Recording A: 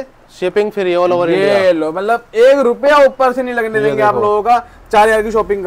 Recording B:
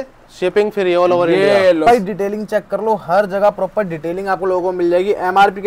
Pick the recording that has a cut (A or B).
B